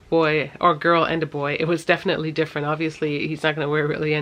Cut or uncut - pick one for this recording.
uncut